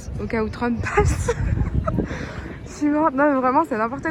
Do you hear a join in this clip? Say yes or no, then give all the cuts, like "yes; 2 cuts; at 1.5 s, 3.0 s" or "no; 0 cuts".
no; 0 cuts